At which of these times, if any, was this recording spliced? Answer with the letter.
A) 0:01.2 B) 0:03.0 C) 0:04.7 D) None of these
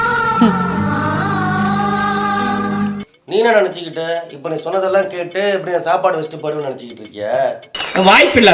B